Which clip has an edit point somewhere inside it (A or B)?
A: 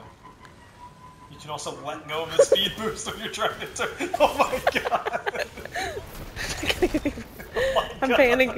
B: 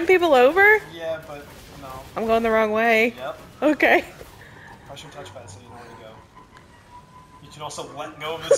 A